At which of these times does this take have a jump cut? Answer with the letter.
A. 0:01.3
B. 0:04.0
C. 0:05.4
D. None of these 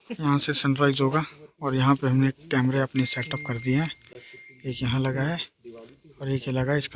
D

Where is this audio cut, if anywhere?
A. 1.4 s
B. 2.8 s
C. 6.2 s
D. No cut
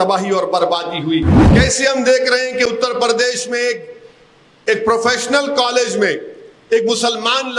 A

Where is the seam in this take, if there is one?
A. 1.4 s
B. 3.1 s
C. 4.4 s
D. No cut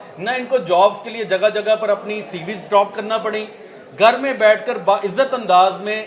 D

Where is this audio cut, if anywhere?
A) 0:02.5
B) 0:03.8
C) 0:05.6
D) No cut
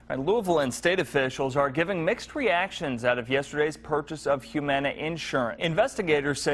C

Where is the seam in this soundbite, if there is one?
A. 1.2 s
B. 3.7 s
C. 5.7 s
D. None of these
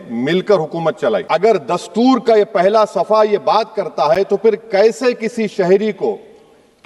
A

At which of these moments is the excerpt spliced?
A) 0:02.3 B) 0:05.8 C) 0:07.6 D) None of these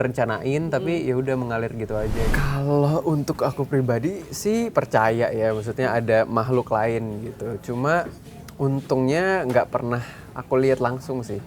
A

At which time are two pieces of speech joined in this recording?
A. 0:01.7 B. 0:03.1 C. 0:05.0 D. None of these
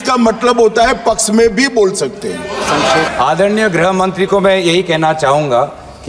B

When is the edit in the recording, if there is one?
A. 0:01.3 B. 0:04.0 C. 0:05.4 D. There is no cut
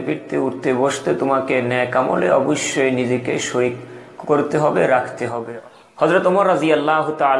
C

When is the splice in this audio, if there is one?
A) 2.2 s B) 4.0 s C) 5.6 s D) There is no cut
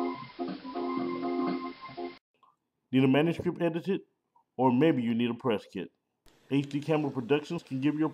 A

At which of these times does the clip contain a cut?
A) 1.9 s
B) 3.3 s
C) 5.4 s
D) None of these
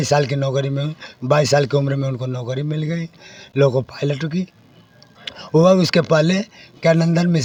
D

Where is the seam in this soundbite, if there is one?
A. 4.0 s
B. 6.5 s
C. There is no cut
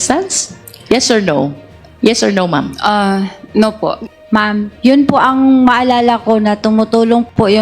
A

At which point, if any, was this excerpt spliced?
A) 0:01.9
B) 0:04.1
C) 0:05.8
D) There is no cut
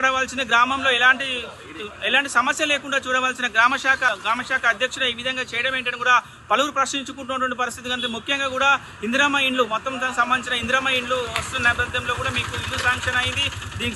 B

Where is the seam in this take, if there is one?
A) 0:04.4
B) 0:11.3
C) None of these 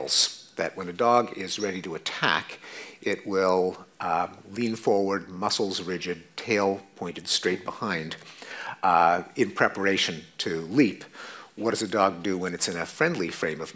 A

